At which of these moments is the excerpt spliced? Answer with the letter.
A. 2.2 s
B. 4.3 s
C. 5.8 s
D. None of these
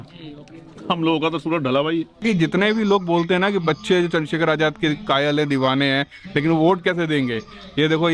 A